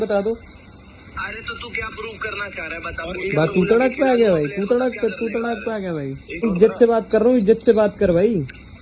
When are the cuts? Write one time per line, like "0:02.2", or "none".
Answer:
0:06.4